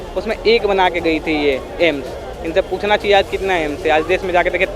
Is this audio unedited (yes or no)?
yes